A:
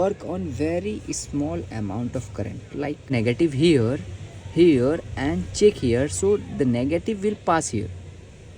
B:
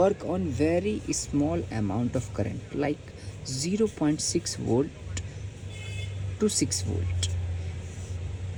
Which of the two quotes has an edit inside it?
A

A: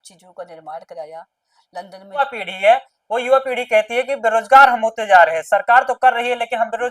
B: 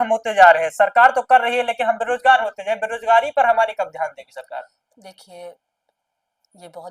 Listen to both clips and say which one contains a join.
A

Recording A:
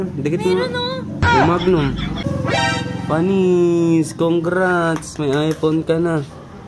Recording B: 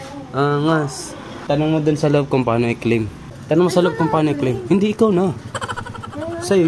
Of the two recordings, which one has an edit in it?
A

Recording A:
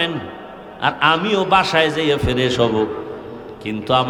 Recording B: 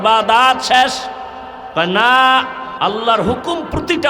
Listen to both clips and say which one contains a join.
B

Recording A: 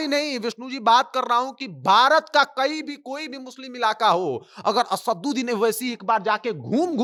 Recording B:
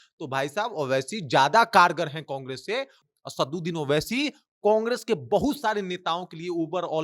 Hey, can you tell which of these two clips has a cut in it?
B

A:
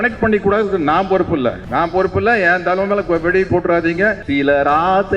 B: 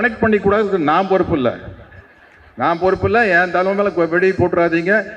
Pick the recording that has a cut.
A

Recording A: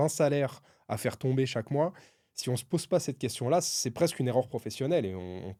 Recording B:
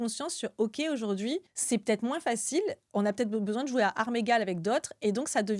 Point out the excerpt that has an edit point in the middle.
B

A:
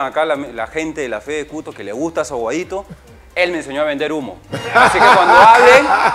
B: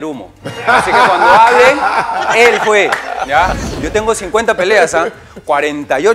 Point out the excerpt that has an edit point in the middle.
B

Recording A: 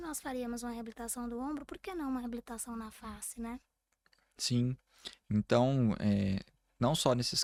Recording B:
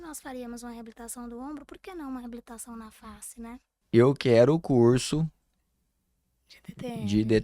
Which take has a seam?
B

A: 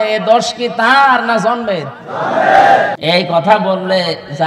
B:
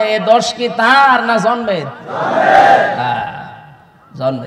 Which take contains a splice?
A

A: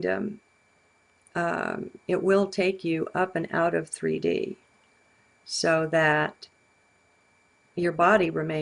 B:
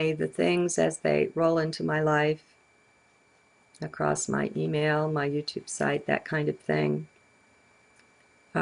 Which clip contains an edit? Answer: B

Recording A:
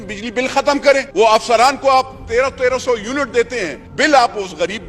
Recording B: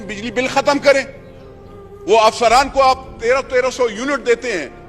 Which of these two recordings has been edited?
A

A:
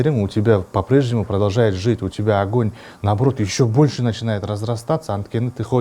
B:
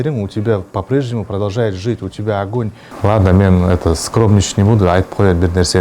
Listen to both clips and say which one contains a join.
B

